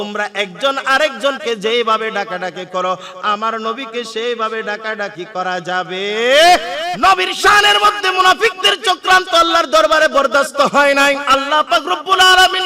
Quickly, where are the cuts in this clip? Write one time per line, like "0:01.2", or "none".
0:06.9
0:11.2